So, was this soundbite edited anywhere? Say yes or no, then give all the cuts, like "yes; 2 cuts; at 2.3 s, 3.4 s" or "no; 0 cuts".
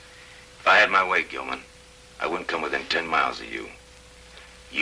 no; 0 cuts